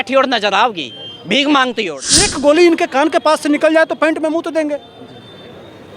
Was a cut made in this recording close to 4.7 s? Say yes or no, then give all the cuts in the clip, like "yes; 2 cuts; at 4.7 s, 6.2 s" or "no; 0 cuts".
no; 1 cut; at 2.3 s